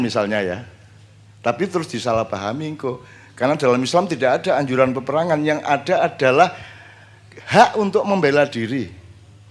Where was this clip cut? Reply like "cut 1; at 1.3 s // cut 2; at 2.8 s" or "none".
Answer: none